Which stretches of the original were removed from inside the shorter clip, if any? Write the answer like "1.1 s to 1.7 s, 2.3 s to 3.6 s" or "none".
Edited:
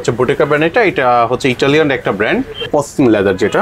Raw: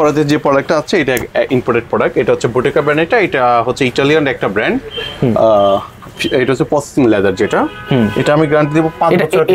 5.0 s to 6.6 s